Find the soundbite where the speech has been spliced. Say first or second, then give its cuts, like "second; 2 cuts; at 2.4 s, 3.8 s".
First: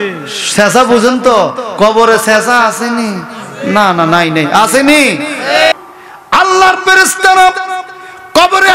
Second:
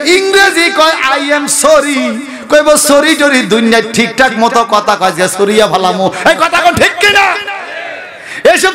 first; 1 cut; at 5.7 s